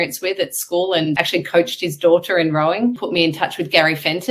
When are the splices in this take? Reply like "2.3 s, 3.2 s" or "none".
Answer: 1.2 s, 3.0 s